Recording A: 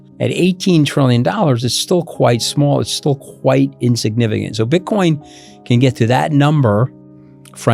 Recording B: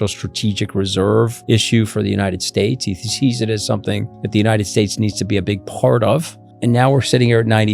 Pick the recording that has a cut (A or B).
B